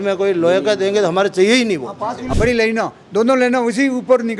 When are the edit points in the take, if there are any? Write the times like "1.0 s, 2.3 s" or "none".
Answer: 2.2 s